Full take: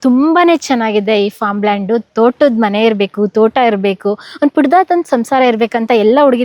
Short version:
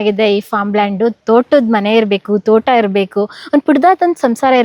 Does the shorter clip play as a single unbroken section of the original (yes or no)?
yes